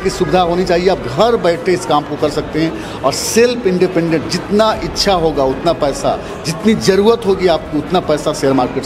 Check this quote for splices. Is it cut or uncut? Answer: uncut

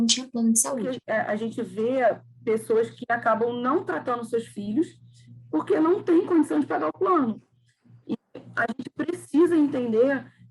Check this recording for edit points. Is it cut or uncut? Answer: cut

